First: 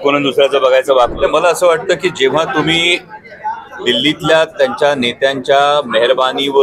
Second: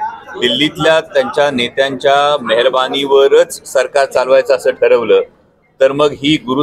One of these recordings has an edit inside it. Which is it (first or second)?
first